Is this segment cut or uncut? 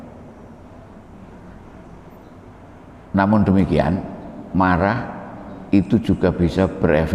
uncut